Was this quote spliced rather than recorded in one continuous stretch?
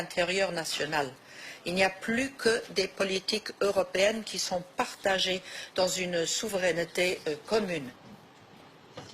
no; 0 cuts

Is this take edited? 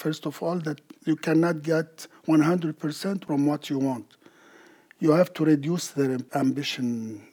yes; 1 cut; at 6.2 s

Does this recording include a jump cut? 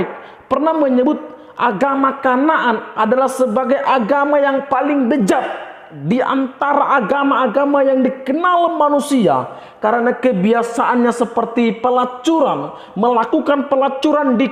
no; 0 cuts

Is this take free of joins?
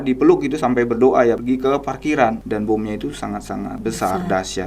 no; 3 cuts; at 1.4 s, 2.4 s, 3.8 s

